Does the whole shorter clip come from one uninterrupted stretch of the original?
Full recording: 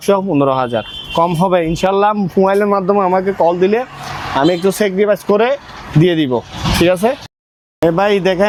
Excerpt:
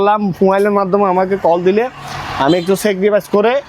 yes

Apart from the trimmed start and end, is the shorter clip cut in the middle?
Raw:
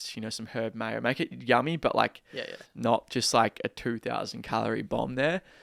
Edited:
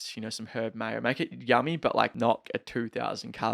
yes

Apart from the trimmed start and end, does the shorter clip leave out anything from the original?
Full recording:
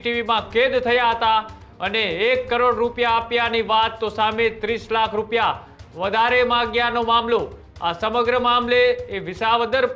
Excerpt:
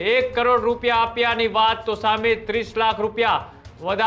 no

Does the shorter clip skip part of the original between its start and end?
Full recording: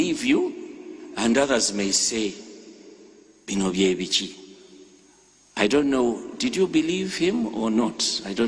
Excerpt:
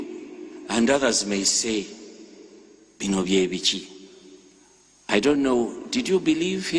no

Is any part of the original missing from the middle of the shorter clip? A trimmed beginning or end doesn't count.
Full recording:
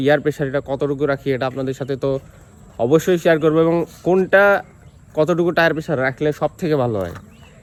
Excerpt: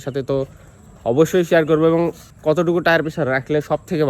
yes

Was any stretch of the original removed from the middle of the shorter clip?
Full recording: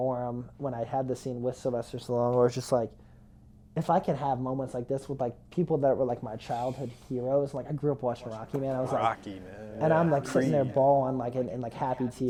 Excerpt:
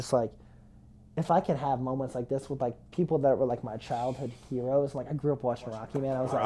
no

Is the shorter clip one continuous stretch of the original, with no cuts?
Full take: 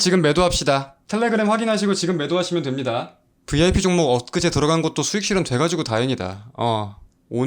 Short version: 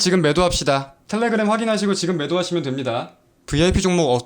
yes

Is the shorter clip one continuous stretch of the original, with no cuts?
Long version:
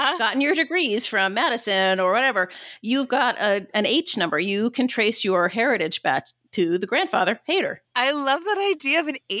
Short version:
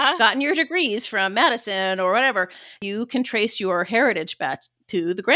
no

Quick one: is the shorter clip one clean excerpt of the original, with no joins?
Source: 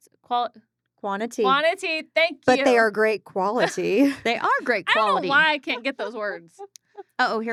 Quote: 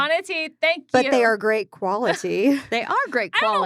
yes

